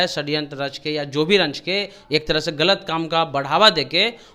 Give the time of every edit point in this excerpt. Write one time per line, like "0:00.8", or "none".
none